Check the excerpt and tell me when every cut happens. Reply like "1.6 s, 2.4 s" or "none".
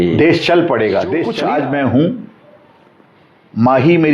1.3 s